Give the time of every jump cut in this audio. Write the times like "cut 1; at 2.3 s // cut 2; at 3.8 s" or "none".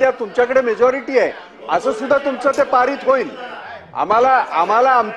none